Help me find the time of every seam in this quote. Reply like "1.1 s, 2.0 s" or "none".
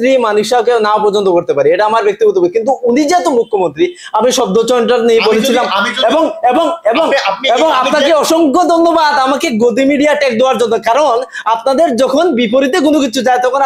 none